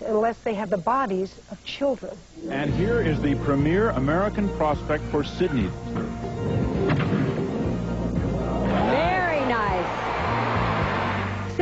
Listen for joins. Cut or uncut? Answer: uncut